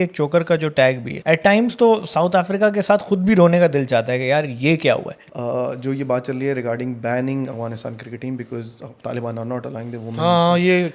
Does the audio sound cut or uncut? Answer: cut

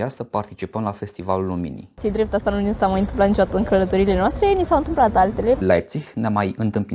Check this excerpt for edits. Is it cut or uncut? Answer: cut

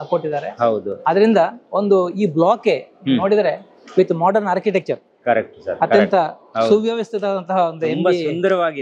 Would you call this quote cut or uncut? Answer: uncut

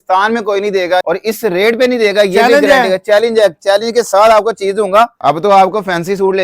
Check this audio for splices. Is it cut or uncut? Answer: cut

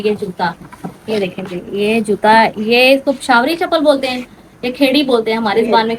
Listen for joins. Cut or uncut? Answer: uncut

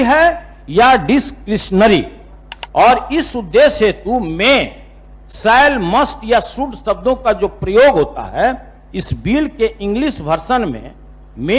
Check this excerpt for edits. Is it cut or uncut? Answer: uncut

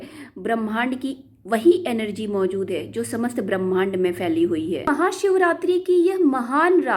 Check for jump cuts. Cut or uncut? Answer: cut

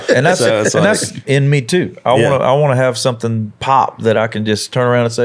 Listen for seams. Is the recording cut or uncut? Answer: cut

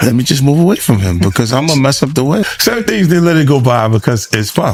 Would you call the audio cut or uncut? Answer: uncut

